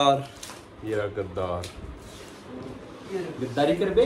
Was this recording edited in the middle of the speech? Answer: no; 0 cuts

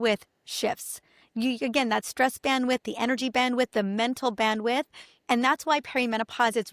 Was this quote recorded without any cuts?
yes; 0 cuts

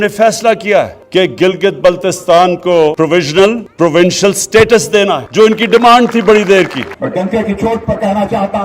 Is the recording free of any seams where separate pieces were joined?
no; 5 cuts; at 1.0 s, 2.9 s, 3.7 s, 5.2 s, 6.9 s

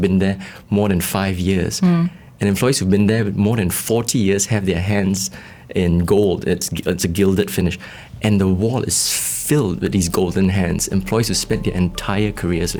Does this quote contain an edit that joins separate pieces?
no; 0 cuts

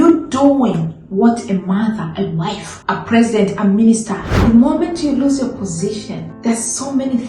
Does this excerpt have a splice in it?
yes; 3 cuts; at 2.7 s, 4.4 s, 6.2 s

